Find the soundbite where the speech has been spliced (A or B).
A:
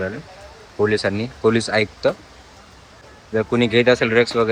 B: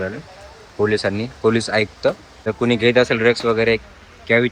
B